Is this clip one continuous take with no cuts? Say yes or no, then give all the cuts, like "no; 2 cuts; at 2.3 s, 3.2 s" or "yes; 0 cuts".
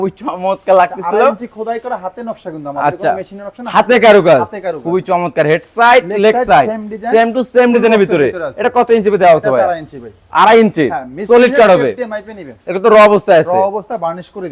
yes; 0 cuts